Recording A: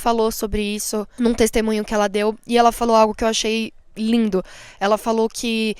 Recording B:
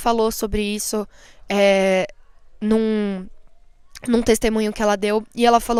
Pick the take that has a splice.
A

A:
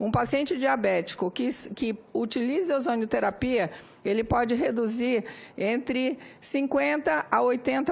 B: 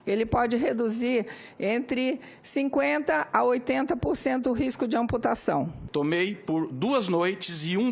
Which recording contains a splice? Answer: B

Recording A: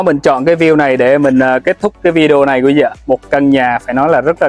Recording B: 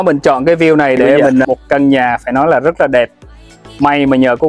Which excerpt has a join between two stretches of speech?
B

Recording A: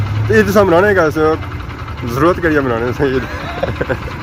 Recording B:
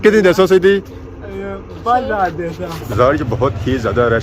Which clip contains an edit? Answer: B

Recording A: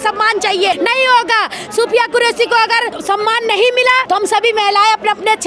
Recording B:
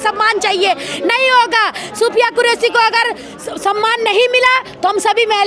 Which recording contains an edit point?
A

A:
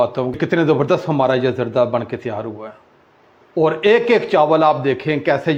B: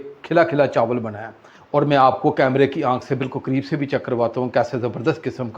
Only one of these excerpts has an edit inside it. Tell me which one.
B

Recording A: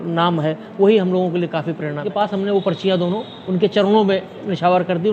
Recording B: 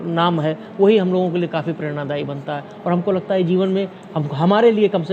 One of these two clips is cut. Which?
A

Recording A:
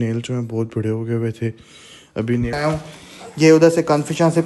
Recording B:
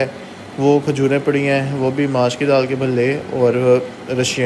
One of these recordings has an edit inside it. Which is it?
A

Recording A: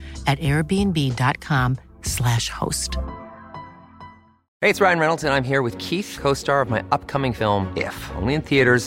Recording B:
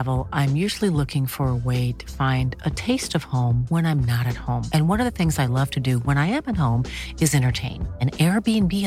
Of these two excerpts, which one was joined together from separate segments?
A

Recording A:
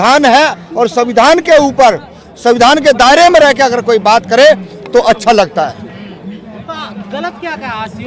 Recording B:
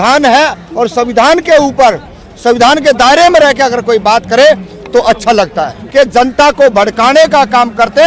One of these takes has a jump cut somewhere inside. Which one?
B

